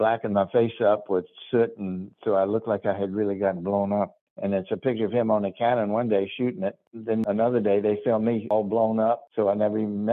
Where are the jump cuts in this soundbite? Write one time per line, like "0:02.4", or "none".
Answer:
0:04.2
0:07.1
0:08.5
0:09.3